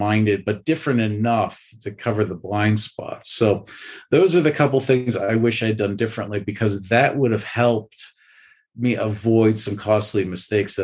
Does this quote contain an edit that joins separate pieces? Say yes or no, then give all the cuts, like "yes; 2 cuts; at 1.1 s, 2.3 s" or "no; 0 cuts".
no; 0 cuts